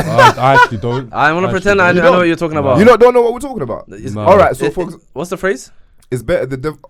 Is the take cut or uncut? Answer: uncut